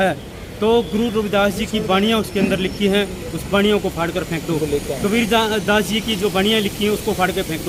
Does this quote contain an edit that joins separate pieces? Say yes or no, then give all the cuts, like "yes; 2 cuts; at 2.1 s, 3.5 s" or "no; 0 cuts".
no; 0 cuts